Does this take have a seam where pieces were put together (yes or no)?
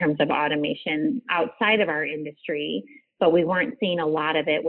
yes